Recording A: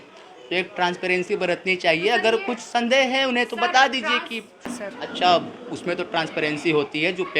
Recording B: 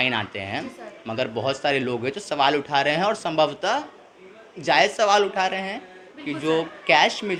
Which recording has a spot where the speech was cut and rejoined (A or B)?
A